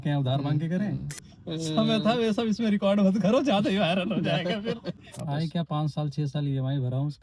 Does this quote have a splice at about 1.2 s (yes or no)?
yes